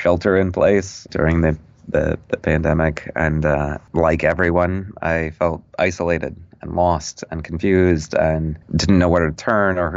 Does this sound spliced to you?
no; 0 cuts

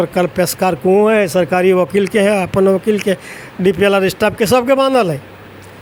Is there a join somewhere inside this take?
no; 0 cuts

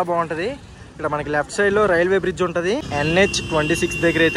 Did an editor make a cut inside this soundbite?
yes; 1 cut; at 2.9 s

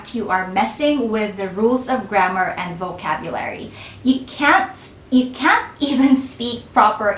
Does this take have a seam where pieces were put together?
no; 0 cuts

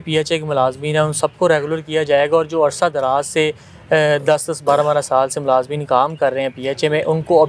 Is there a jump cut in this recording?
no; 0 cuts

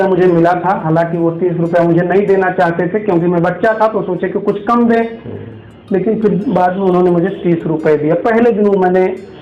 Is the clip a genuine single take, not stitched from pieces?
yes; 0 cuts

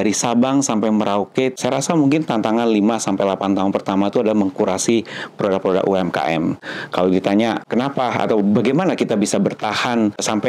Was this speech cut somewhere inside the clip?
yes; 2 cuts; at 1.5 s, 6.6 s

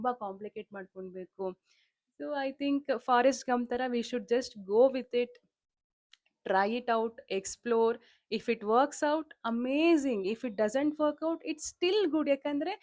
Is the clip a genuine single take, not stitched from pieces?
yes; 0 cuts

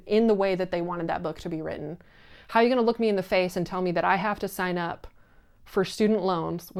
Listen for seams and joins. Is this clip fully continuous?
yes; 0 cuts

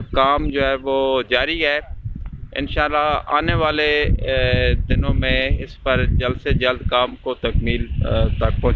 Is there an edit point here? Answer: no; 0 cuts

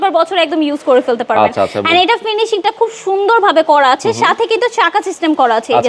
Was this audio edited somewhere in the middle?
no; 0 cuts

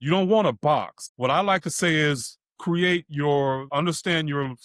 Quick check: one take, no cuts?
no; 2 cuts; at 1.0 s, 3.6 s

